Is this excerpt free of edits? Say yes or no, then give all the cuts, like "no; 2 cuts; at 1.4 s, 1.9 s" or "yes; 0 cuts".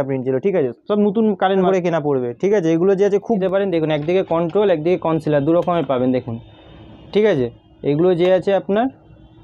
no; 2 cuts; at 1.7 s, 3.4 s